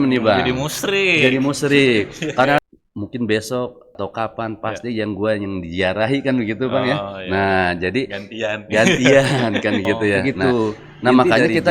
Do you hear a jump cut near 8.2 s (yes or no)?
no